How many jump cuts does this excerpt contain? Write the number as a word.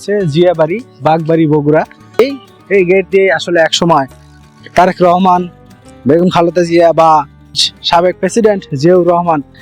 two